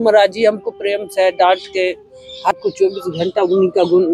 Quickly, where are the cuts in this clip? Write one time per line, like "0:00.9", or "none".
0:02.5